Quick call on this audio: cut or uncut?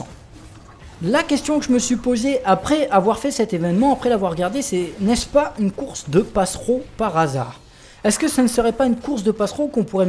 uncut